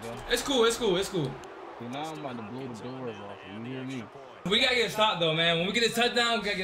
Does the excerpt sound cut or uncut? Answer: cut